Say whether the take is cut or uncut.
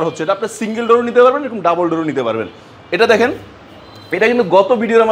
uncut